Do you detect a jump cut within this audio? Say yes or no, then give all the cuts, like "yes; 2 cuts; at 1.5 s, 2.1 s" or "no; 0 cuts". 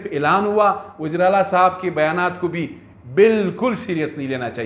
no; 0 cuts